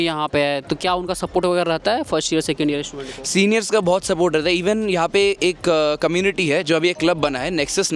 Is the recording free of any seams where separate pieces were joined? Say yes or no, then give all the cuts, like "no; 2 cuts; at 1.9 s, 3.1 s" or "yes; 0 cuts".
yes; 0 cuts